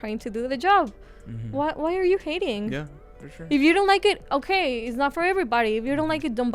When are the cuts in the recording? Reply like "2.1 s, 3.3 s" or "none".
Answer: none